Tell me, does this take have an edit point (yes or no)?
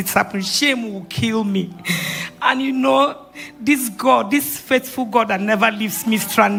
no